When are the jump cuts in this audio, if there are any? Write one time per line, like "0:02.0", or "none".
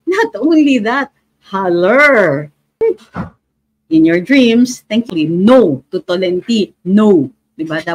0:02.6